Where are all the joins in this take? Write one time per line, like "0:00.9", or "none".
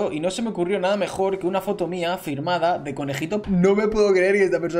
0:03.4